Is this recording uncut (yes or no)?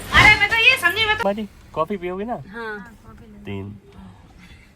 no